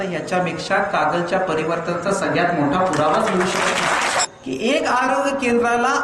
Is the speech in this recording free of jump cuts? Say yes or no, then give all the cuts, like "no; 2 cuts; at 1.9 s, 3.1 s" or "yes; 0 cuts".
no; 1 cut; at 4.2 s